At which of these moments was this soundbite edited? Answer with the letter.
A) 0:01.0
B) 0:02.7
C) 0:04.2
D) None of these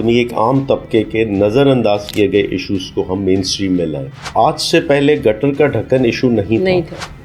C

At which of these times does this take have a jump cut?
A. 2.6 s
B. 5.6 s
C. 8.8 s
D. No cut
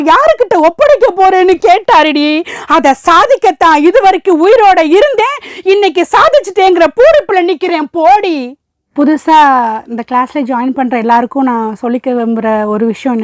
C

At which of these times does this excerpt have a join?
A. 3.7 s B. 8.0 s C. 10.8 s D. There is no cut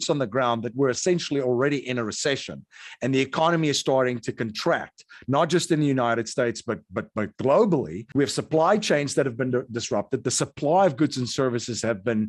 B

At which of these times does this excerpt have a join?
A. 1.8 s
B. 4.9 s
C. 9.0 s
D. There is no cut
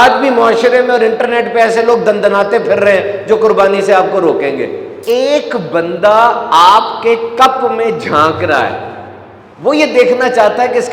B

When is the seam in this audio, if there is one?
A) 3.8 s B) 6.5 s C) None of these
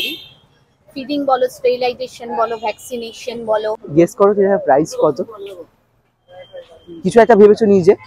A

